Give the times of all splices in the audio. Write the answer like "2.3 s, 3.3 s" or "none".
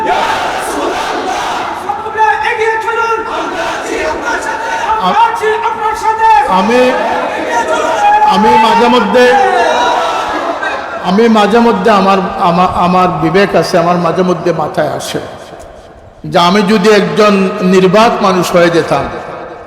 none